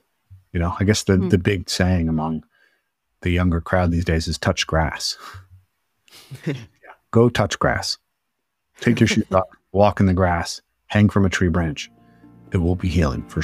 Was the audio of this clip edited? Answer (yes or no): yes